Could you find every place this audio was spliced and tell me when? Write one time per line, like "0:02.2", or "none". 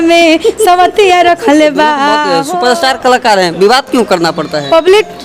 0:02.4